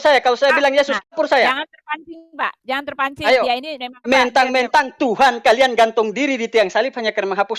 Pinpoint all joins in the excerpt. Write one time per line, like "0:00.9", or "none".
0:01.1
0:04.0